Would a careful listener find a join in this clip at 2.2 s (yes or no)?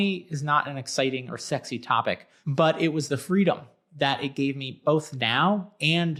no